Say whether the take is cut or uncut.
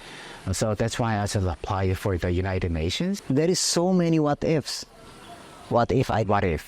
cut